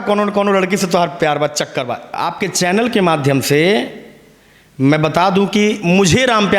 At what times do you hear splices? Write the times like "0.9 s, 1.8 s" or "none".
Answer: 2.2 s